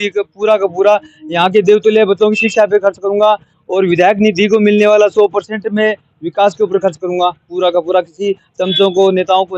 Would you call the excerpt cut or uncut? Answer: uncut